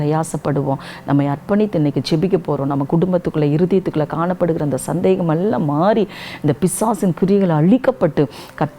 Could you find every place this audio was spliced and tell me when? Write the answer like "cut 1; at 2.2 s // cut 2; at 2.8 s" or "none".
none